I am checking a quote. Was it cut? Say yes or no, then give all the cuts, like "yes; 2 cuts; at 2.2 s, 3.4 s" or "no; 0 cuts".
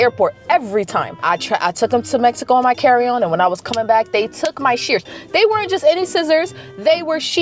yes; 1 cut; at 1.2 s